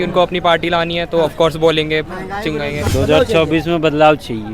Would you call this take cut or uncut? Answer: cut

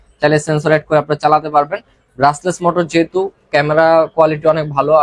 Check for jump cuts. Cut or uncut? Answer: uncut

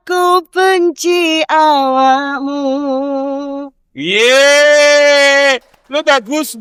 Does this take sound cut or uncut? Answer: uncut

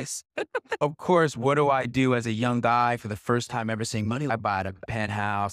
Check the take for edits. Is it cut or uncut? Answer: cut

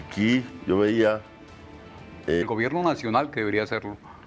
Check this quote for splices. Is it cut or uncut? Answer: uncut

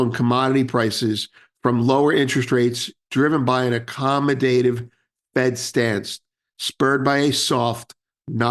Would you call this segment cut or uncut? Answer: uncut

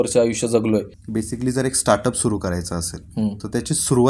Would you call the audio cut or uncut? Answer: cut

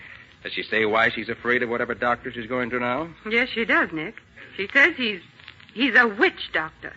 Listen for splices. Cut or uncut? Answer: uncut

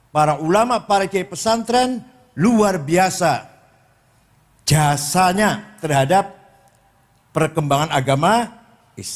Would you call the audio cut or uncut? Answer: uncut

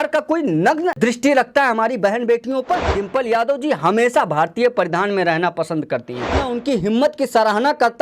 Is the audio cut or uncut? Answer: cut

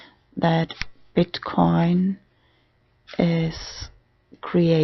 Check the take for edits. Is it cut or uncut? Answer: cut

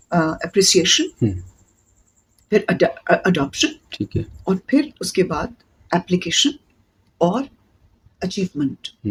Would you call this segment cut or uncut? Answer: uncut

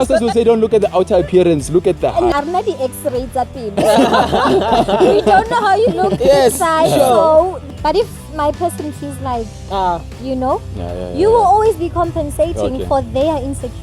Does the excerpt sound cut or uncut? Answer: cut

